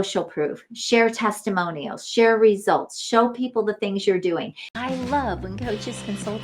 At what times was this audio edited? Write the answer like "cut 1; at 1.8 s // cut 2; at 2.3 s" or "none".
cut 1; at 4.7 s